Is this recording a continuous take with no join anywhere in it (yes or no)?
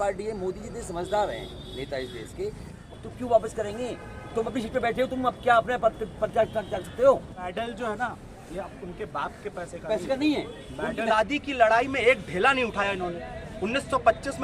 no